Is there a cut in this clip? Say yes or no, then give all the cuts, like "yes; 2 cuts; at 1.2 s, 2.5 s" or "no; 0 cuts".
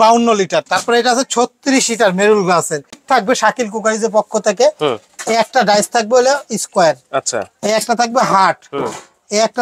yes; 1 cut; at 3.0 s